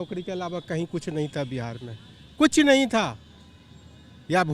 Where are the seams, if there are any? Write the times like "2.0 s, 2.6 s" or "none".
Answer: none